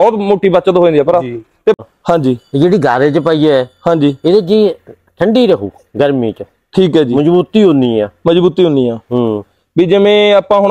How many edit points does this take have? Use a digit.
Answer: 1